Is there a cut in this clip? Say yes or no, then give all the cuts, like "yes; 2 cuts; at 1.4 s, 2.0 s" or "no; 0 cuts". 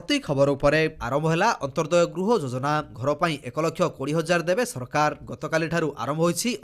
yes; 1 cut; at 0.9 s